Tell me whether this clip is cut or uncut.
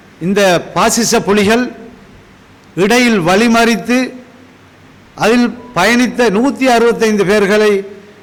uncut